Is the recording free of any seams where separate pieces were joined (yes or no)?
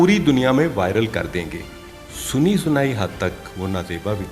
yes